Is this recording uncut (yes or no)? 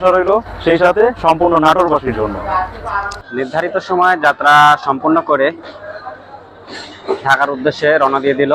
no